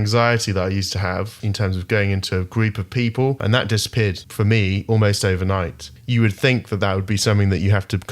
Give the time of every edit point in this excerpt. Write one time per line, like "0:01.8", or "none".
0:03.4
0:05.8